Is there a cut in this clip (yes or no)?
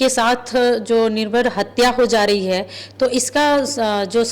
no